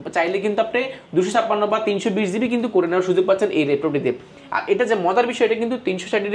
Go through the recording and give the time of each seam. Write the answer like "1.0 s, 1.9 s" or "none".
none